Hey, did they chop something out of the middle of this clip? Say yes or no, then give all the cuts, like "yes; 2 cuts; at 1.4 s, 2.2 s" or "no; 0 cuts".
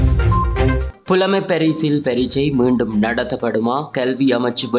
yes; 1 cut; at 1.0 s